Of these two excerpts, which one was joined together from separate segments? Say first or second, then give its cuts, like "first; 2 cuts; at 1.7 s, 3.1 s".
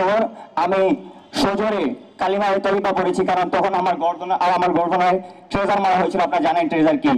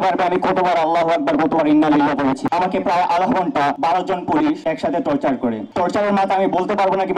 second; 4 cuts; at 2.4 s, 3.8 s, 4.6 s, 5.7 s